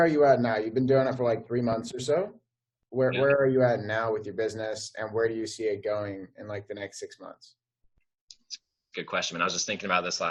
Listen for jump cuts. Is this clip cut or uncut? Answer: uncut